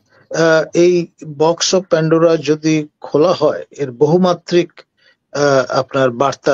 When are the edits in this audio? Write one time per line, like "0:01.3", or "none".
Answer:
none